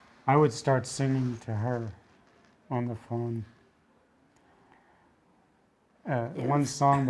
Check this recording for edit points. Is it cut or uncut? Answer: uncut